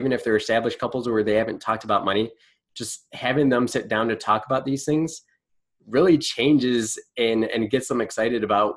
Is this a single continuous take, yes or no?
yes